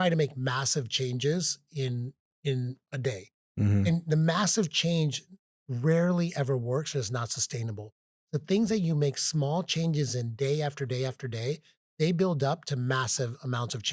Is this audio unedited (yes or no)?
yes